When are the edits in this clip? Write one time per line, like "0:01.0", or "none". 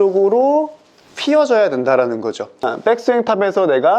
0:02.7